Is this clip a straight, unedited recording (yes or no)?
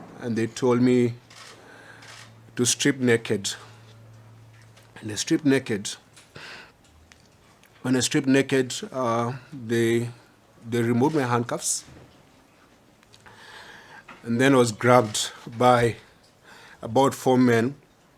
yes